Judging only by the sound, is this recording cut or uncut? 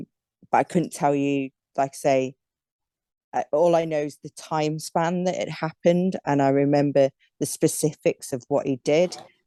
uncut